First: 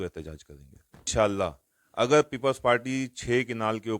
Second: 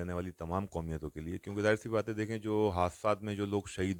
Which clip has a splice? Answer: first; 1 cut; at 1.1 s

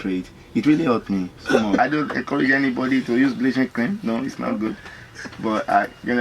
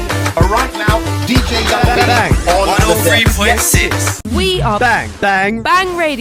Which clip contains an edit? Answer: first; 1 cut; at 1.8 s

